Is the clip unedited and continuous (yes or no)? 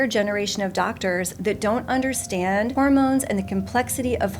no